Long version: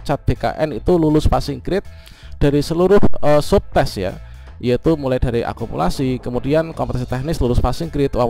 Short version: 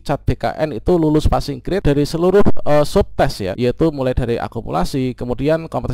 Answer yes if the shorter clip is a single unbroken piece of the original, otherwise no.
no